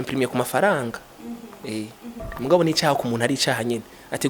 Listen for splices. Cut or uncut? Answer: cut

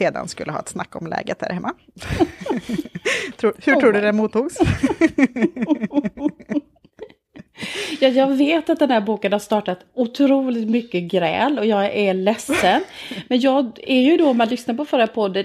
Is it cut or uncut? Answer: uncut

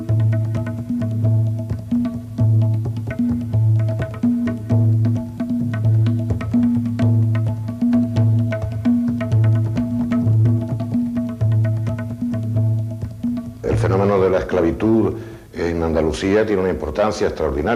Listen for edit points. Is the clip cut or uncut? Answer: cut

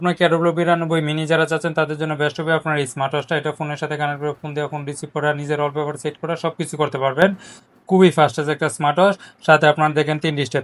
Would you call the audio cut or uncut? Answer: uncut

